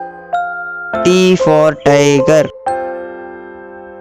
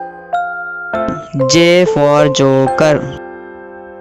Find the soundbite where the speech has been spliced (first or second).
second